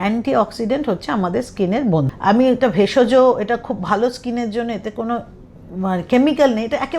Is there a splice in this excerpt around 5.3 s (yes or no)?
no